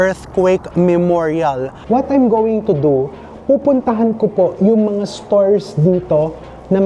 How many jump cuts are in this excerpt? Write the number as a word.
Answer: one